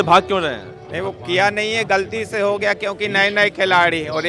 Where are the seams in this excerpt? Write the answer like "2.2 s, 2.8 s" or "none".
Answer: none